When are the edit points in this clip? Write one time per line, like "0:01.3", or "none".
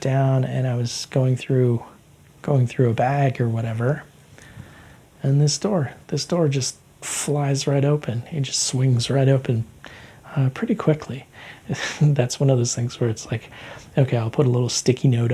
0:11.6